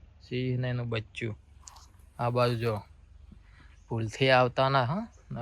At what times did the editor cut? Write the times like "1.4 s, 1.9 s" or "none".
none